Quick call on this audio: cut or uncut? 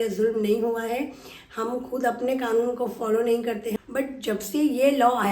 cut